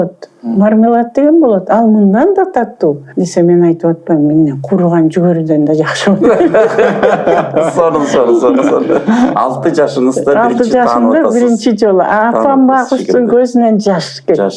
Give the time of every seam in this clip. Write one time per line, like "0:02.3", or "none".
0:03.1